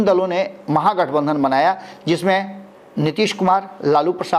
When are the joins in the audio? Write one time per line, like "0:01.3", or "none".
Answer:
none